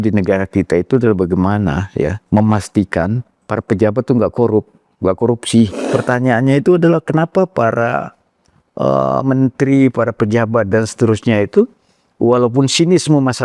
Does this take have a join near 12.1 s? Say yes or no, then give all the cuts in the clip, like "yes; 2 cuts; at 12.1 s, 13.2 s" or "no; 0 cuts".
no; 2 cuts; at 2.2 s, 5.8 s